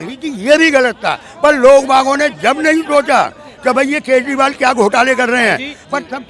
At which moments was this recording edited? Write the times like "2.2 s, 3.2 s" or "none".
none

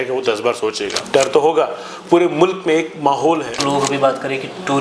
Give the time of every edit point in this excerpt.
0.9 s, 3.6 s

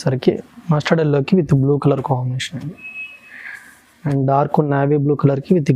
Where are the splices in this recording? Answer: none

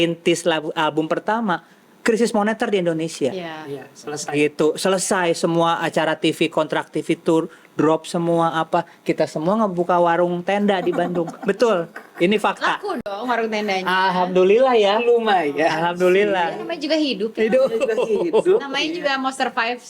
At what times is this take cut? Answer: none

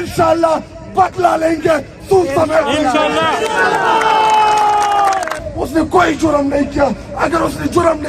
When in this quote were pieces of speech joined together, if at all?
5.4 s

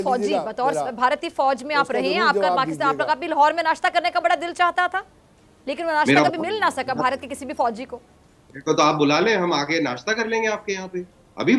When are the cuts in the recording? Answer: none

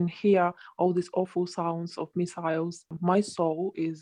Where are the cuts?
3.0 s

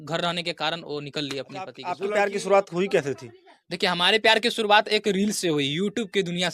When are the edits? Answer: 1.8 s

